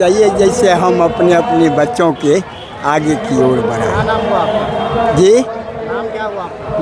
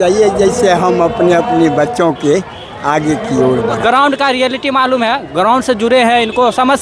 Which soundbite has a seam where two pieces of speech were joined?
second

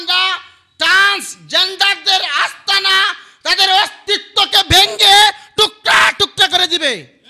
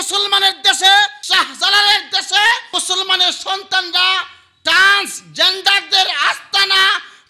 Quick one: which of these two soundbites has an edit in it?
second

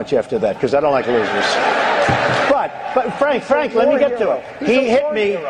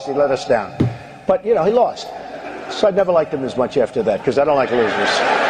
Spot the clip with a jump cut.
first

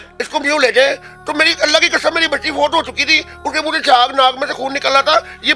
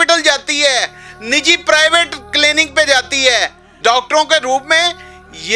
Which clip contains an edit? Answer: second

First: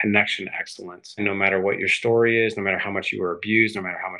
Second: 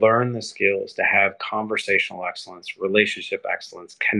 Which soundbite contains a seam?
first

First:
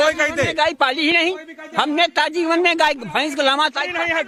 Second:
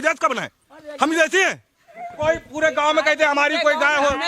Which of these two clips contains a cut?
second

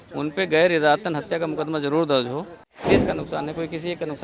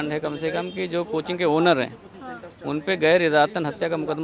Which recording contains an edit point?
first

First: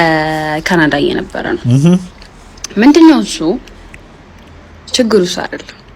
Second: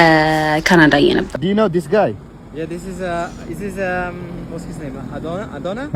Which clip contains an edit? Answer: second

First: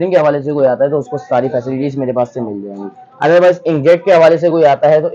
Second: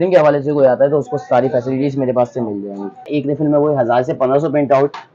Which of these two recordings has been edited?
second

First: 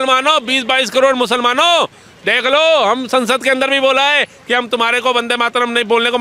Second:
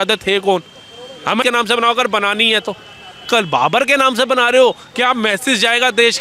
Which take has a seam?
second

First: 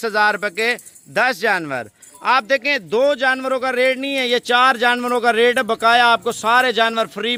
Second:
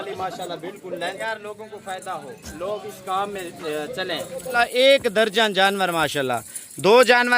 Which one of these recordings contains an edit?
second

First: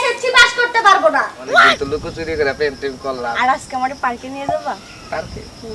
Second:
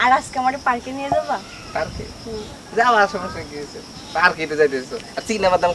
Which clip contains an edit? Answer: first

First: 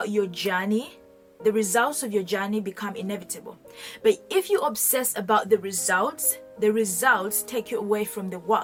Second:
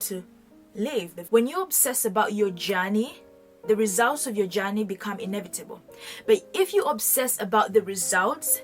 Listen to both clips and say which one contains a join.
second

